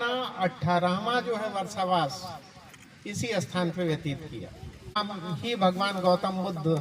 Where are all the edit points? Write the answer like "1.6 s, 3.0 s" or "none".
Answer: 5.0 s